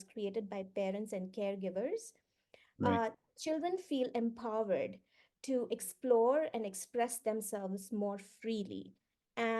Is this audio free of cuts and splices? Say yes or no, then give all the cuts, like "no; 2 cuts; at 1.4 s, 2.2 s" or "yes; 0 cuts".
yes; 0 cuts